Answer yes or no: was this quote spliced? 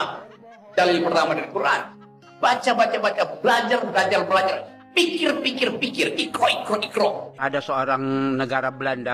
yes